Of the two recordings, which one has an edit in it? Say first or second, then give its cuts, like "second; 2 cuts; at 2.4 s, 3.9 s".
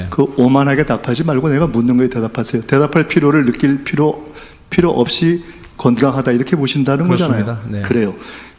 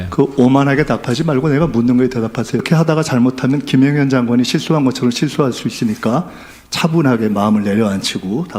second; 1 cut; at 2.6 s